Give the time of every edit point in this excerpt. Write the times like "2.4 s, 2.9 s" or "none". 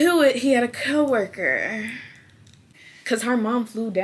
2.6 s

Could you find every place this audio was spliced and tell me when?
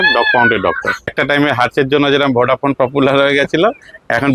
1.2 s

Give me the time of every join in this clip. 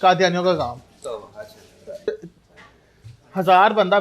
2.1 s

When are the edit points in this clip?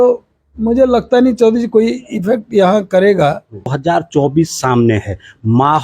3.8 s

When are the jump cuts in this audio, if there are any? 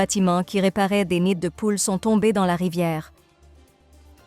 3.1 s

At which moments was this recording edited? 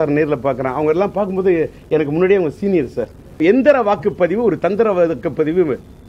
3.4 s

